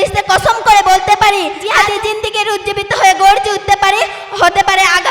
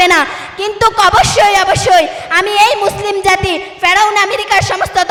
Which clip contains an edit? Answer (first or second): first